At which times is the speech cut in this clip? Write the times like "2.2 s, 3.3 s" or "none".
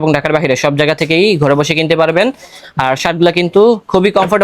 none